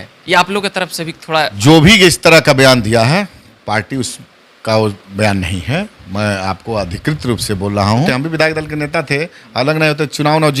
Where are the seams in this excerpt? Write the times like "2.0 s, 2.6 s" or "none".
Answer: 1.5 s, 8.1 s